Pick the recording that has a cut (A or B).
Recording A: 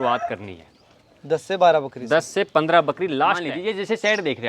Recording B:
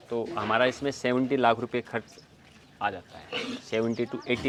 A